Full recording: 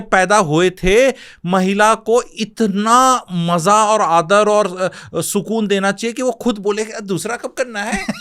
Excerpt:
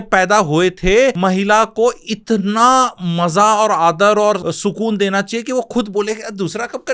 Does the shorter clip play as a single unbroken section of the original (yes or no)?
no